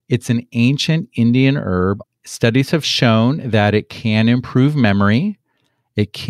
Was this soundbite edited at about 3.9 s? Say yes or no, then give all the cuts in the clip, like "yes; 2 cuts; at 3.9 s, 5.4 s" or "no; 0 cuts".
no; 1 cut; at 2.0 s